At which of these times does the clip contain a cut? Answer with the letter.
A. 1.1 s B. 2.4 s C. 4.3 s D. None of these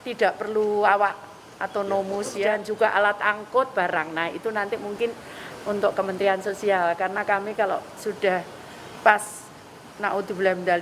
B